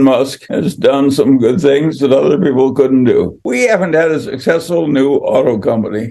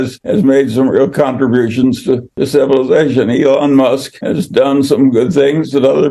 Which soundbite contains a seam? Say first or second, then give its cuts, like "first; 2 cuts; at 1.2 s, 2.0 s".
first; 1 cut; at 3.4 s